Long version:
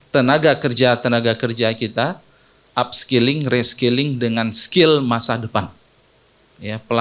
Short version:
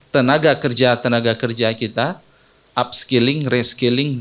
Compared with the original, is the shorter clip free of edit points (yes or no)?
yes